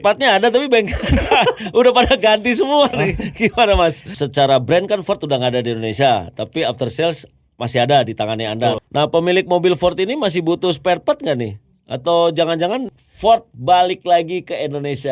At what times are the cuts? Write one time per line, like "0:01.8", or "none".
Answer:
0:04.0
0:08.8
0:12.9

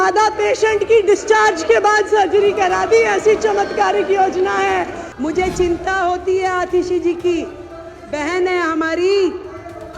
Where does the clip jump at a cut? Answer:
0:05.0

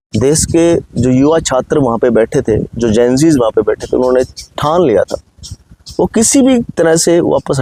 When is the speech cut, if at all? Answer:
none

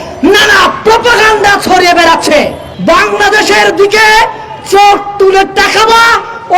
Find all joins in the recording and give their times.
0:02.7

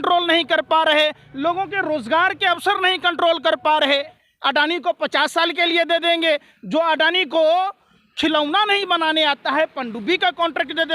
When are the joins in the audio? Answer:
0:04.3

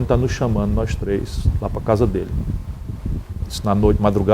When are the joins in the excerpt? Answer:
none

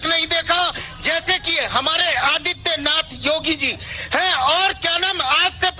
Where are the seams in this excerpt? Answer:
none

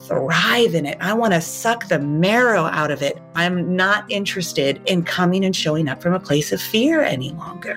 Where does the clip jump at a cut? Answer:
0:03.3
0:04.8

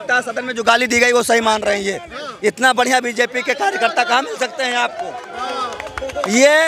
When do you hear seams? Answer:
none

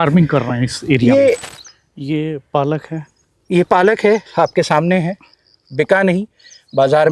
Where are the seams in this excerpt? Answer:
0:01.4

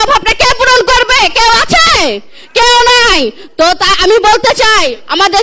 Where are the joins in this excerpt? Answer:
none

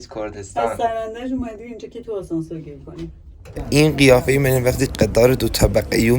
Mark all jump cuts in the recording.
0:03.6

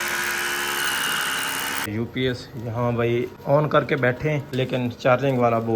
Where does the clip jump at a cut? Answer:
0:01.9
0:03.4
0:04.5

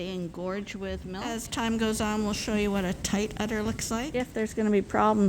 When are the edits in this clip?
0:01.4
0:04.3

